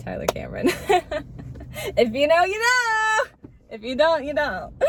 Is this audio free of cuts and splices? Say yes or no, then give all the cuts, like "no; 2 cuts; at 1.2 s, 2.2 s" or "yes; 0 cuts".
yes; 0 cuts